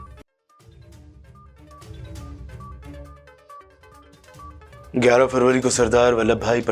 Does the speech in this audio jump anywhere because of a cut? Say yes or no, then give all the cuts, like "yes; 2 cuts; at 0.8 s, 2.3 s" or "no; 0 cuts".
no; 0 cuts